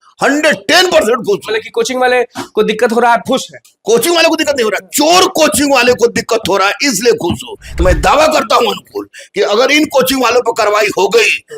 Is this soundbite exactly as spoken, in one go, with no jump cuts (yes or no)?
no